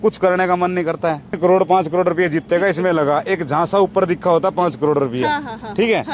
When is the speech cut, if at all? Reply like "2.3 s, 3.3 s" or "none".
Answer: 1.3 s